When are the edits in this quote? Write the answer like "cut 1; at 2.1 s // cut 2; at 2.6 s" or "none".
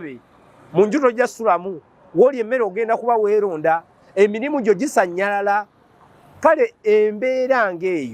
none

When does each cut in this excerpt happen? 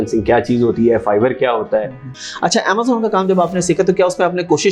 cut 1; at 2.1 s

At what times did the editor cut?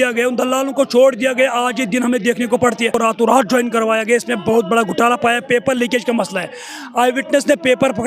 cut 1; at 2.9 s

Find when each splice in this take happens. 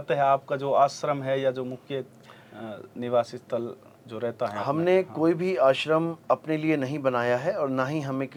none

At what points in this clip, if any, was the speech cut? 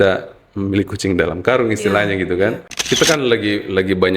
cut 1; at 2.7 s

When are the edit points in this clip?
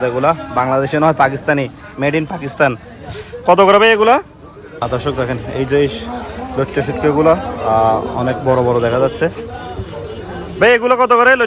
cut 1; at 4.7 s

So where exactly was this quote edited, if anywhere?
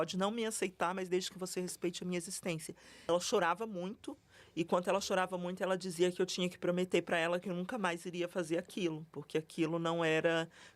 cut 1; at 3.1 s

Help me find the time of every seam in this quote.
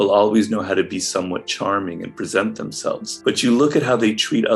cut 1; at 3.1 s

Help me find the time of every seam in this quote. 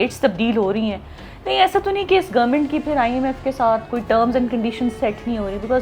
none

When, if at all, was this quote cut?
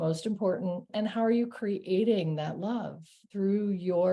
cut 1; at 0.9 s // cut 2; at 3.3 s

